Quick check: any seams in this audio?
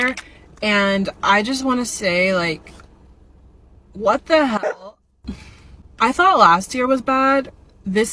no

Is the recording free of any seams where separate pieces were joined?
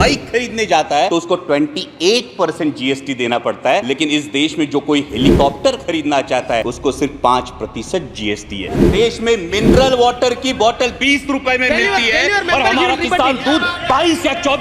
no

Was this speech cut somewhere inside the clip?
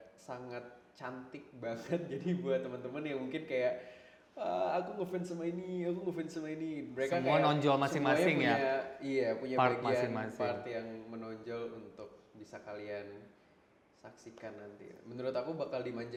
no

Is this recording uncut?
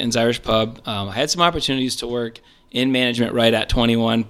yes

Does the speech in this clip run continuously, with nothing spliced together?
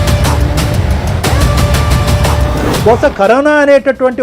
no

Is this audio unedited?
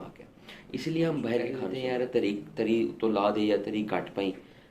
no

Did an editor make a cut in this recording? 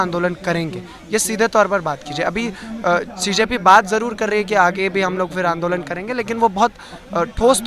no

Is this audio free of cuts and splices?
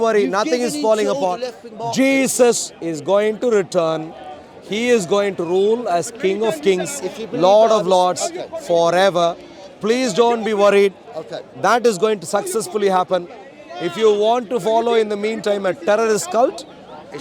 yes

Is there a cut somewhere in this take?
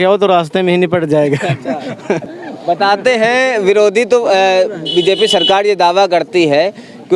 no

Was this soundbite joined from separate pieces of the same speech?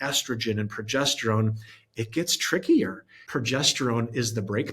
yes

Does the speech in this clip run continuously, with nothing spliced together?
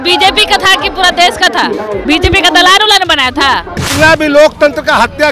no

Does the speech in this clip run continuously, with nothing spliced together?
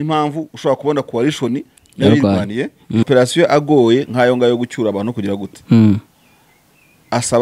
no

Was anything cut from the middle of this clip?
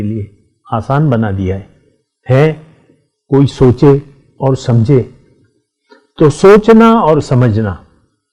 no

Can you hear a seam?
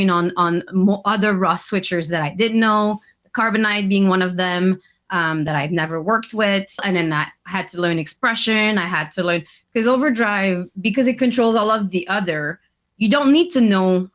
yes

